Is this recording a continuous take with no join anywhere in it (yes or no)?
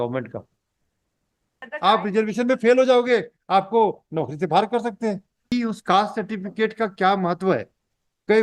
no